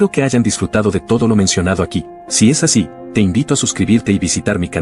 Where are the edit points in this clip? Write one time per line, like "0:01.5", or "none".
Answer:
none